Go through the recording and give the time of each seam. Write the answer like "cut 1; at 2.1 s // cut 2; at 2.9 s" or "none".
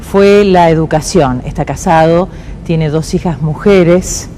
none